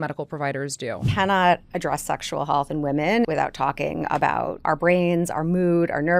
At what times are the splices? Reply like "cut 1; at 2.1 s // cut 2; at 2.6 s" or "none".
cut 1; at 1.1 s // cut 2; at 3.3 s // cut 3; at 4.6 s